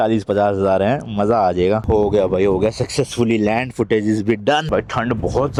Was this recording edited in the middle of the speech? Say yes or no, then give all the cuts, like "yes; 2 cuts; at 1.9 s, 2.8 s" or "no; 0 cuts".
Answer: no; 0 cuts